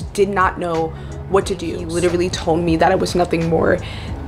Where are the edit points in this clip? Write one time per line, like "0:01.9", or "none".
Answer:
0:01.8